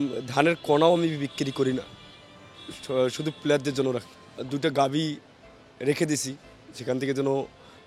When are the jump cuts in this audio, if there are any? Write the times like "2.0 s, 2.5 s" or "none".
4.4 s